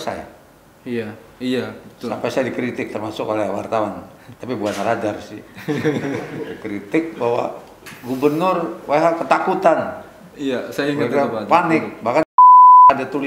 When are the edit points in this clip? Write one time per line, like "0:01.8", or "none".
none